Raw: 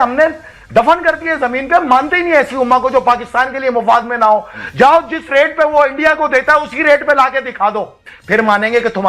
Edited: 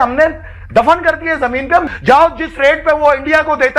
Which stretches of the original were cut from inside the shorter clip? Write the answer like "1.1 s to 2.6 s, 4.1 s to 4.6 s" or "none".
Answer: 1.8 s to 4.6 s

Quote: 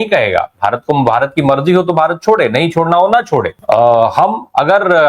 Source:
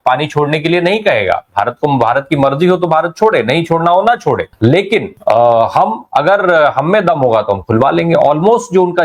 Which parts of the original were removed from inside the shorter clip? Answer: 4.5 s to 5.1 s

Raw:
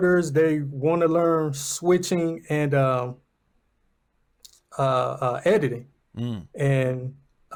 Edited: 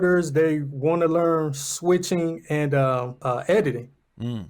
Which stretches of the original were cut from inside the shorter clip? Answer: 3.2 s to 5.2 s

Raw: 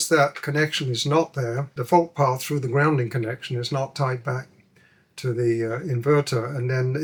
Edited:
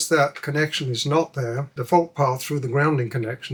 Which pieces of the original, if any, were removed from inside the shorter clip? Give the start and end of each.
none

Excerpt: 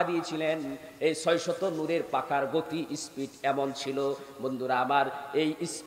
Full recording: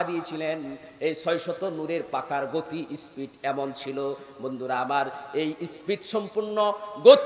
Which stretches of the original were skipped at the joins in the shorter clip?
none

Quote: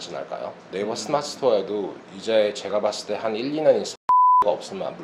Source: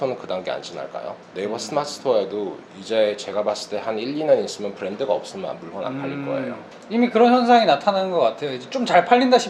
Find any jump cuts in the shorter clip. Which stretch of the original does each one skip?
none

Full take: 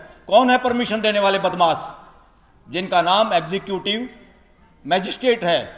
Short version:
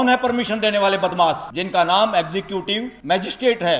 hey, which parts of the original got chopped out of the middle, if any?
1.9 s to 2.7 s, 4.1 s to 4.7 s

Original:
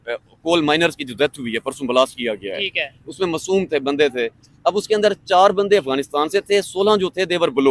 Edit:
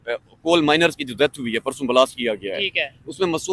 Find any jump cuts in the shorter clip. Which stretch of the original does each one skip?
none

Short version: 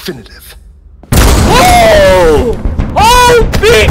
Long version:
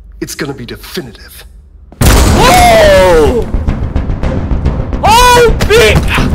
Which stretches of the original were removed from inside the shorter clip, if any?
3.6 s to 4.8 s

